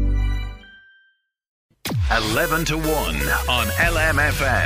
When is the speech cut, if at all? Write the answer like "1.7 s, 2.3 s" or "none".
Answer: 1.8 s

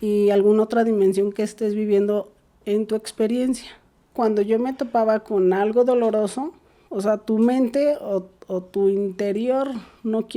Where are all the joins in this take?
4.1 s

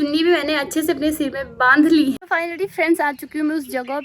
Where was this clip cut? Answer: 2.2 s

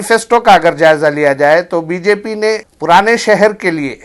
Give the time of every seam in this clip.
2.7 s

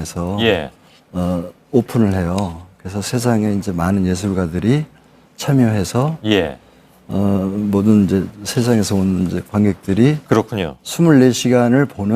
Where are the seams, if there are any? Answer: 4.5 s

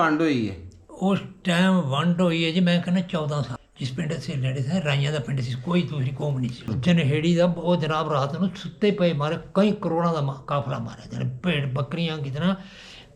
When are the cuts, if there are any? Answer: 3.5 s, 6.7 s

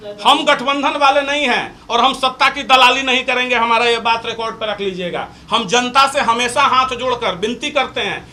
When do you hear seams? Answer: none

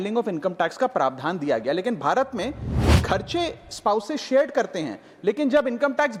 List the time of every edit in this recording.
none

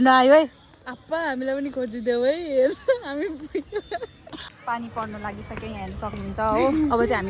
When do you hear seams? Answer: 4.6 s

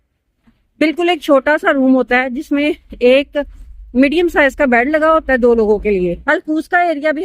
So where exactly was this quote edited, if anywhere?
6.2 s

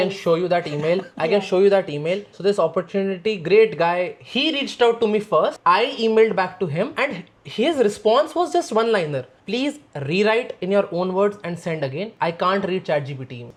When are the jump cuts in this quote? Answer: none

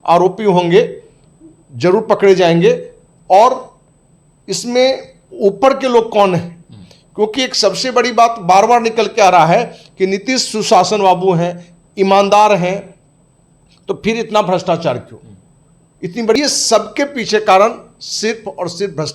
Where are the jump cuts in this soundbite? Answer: 16.4 s

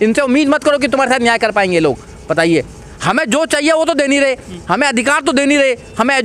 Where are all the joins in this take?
none

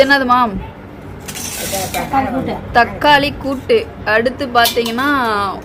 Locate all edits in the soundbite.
none

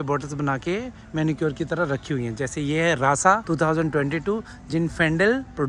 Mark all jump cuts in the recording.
3.4 s

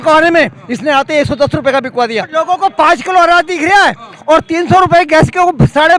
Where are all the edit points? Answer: 2.3 s

